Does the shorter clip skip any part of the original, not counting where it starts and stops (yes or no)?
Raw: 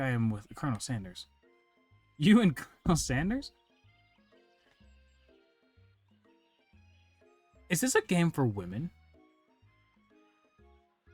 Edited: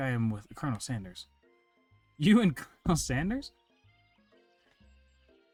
no